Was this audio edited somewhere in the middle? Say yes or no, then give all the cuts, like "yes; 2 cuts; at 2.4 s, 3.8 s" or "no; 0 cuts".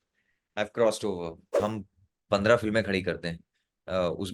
yes; 1 cut; at 1.6 s